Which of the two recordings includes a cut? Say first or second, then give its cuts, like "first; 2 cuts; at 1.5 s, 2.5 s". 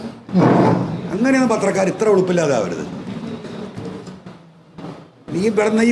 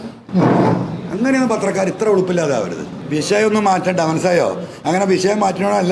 second; 1 cut; at 2.9 s